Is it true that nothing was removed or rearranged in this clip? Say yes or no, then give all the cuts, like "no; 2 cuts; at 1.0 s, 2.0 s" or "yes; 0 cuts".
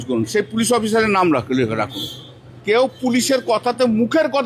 no; 1 cut; at 2.5 s